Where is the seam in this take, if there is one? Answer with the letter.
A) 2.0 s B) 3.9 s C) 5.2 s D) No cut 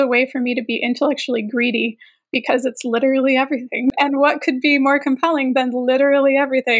B